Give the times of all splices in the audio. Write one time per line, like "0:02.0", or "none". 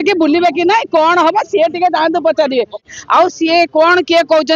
0:02.9